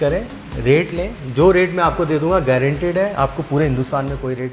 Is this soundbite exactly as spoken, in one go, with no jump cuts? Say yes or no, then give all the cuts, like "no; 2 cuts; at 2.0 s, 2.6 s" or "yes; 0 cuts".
yes; 0 cuts